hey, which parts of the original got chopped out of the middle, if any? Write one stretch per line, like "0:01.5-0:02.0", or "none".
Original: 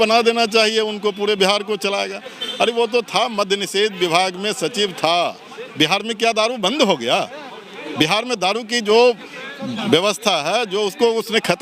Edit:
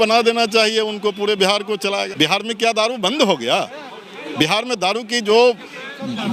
0:02.1-0:05.7